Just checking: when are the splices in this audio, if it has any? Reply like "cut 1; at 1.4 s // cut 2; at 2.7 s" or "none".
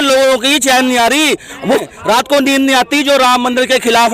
cut 1; at 1.9 s